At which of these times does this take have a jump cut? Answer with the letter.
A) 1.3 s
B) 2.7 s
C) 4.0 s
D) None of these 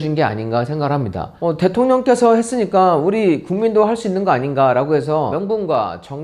A